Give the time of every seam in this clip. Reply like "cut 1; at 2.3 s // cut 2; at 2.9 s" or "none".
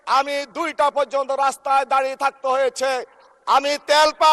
none